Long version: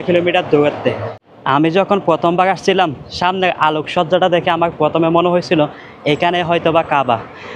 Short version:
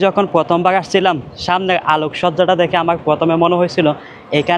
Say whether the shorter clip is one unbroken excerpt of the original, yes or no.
yes